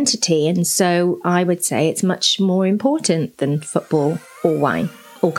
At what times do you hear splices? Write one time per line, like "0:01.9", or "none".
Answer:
0:04.3